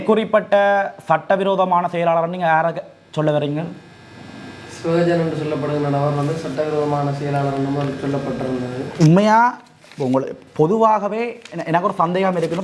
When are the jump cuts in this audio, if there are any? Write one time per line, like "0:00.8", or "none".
0:08.8

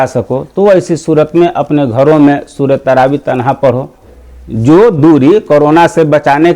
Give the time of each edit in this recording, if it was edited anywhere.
0:04.2

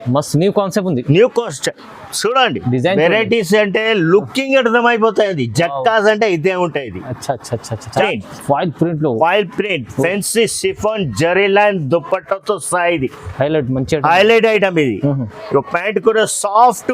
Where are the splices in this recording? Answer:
0:08.0

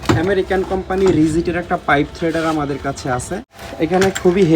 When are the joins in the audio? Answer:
0:03.6

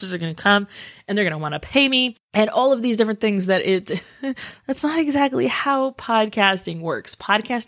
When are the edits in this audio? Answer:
none

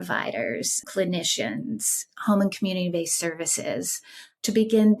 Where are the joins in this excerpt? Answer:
0:00.8
0:04.1

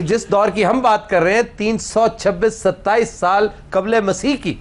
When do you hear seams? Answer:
none

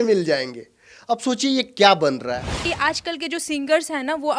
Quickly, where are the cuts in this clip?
0:02.7

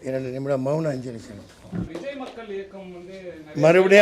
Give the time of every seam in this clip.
0:01.9

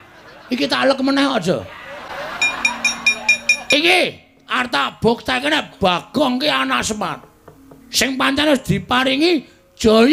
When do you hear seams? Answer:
0:02.1
0:03.6

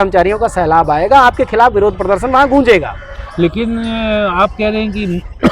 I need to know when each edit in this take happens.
none

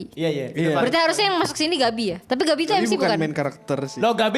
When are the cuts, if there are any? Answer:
0:02.2

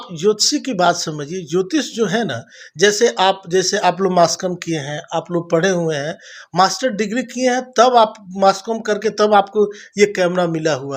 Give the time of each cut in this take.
none

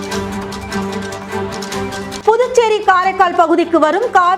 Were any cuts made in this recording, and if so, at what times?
0:02.2

